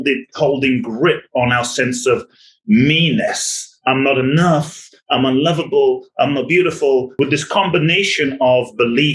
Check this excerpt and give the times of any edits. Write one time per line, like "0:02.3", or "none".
0:07.1